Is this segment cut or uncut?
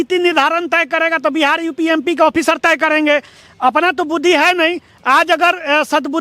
uncut